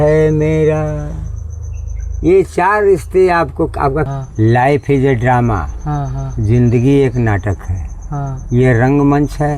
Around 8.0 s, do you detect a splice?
no; 1 cut; at 4.1 s

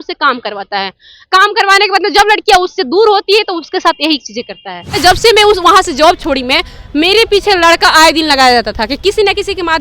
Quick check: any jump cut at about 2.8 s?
no; 1 cut; at 4.9 s

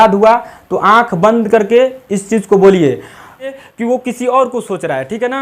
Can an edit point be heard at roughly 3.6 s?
yes; 1 cut; at 3.6 s

